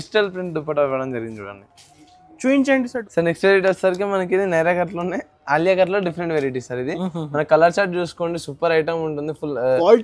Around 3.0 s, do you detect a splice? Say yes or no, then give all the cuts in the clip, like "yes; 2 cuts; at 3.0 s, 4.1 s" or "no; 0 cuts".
yes; 1 cut; at 3.0 s